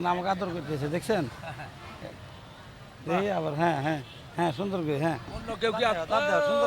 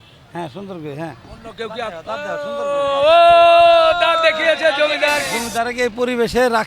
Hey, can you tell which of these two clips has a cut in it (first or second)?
second